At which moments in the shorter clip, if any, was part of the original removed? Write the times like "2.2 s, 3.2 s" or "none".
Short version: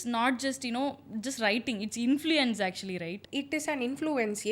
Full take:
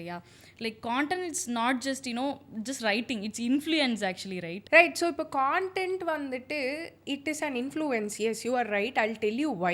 3.2 s